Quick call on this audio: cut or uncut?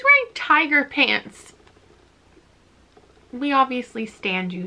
uncut